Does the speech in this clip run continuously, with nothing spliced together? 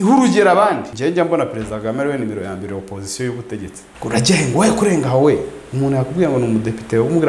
no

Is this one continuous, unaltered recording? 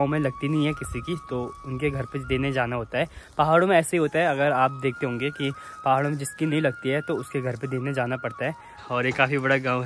no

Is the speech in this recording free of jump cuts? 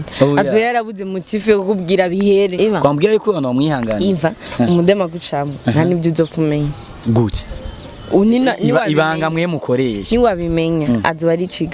no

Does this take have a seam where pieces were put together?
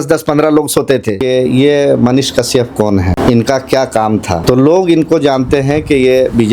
yes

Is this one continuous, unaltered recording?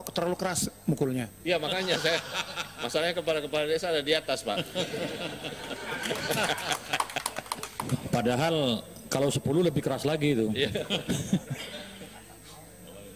yes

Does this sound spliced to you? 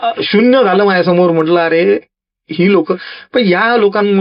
no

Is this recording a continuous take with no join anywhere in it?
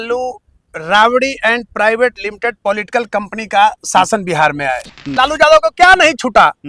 no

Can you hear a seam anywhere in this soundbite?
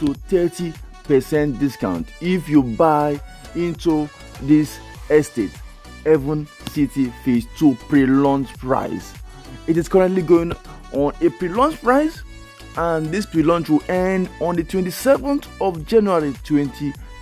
no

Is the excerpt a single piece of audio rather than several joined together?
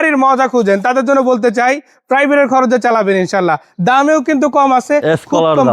yes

